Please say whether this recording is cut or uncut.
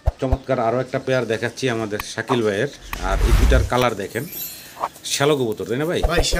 uncut